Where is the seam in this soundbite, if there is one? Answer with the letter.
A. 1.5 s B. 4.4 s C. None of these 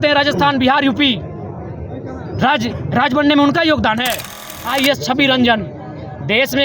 B